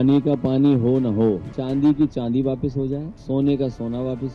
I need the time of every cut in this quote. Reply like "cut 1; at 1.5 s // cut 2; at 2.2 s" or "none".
cut 1; at 1.5 s // cut 2; at 3.1 s